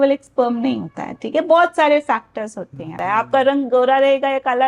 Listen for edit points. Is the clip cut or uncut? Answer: cut